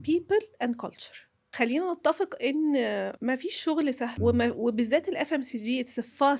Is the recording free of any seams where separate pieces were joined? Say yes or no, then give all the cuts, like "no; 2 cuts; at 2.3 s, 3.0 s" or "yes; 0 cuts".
no; 3 cuts; at 1.5 s, 3.1 s, 4.1 s